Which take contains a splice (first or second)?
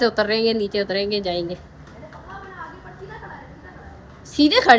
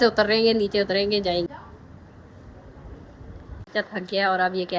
second